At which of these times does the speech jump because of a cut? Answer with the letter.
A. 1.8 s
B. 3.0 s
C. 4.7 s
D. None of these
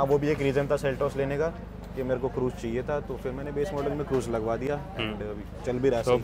D